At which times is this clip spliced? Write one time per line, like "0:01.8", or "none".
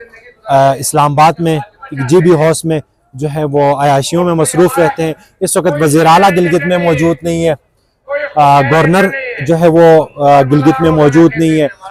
none